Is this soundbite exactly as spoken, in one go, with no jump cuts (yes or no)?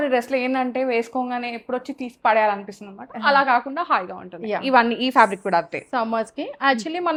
yes